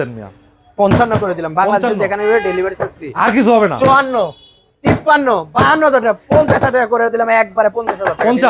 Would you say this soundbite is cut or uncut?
uncut